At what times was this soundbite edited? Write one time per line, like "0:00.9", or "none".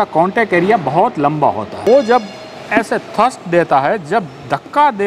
0:01.7